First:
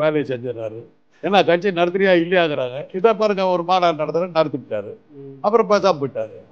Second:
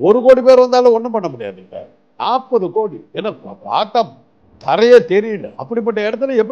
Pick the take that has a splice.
second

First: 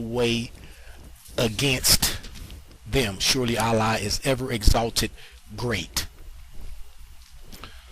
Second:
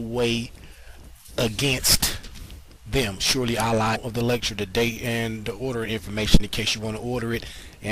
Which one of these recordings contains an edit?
first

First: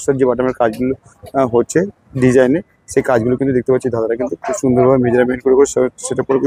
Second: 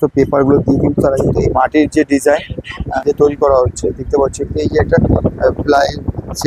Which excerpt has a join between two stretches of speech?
second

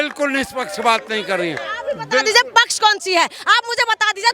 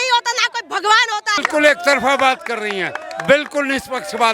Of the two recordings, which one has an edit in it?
second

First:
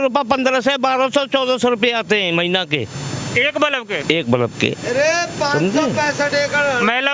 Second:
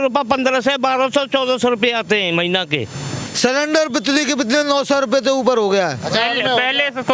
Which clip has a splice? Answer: second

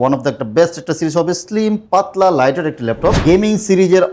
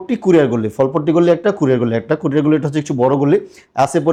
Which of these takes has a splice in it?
first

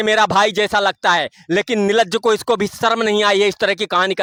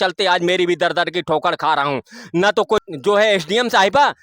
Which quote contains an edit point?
second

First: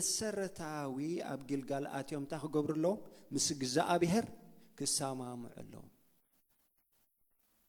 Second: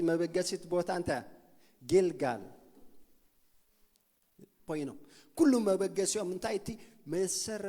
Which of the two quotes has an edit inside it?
second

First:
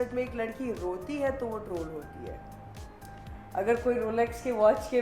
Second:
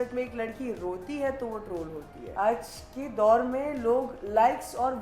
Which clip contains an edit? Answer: second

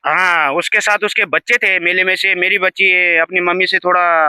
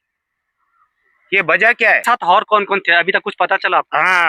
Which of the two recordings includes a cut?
second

